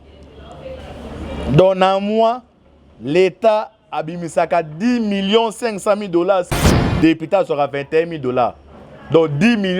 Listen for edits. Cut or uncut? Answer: cut